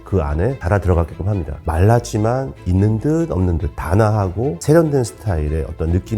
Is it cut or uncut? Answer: cut